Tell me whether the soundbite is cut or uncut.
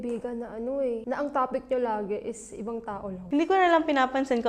cut